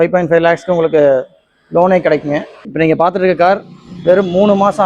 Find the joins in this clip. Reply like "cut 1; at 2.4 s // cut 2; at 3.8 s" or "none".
cut 1; at 2.6 s